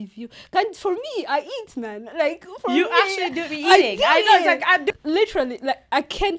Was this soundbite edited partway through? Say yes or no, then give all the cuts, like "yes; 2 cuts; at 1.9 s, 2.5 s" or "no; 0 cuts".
yes; 1 cut; at 4.9 s